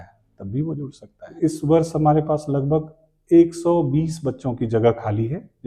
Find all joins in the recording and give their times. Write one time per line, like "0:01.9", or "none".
0:01.3